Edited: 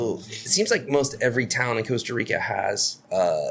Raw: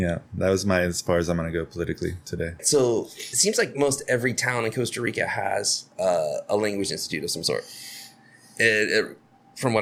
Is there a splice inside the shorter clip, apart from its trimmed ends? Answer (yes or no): no